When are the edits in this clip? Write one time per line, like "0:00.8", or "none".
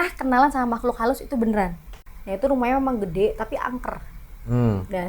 0:02.1